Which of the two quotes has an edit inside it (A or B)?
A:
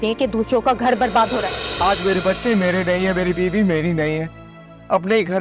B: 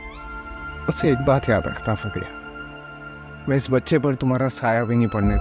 A